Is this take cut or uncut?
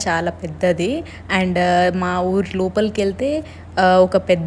uncut